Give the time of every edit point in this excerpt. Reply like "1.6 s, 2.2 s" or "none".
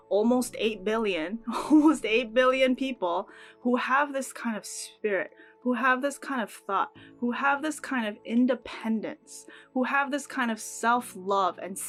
none